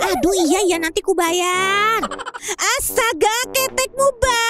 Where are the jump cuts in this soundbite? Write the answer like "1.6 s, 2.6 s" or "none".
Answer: 2.3 s